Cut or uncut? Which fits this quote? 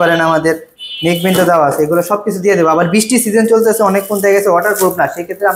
uncut